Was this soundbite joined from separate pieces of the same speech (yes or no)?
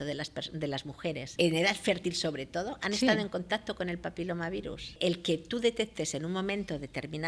yes